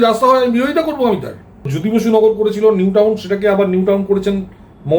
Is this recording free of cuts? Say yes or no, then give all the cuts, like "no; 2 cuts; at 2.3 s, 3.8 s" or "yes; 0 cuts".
no; 1 cut; at 1.8 s